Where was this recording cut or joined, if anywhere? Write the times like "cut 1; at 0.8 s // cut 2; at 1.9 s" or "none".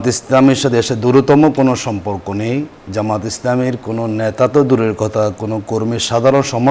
none